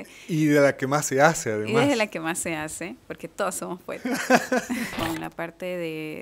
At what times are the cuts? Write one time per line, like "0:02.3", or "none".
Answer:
0:04.9